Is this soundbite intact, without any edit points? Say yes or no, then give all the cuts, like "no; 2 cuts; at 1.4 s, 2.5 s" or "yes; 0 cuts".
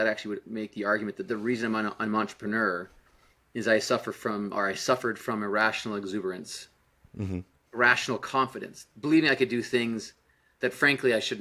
yes; 0 cuts